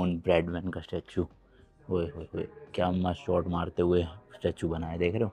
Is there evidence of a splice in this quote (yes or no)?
no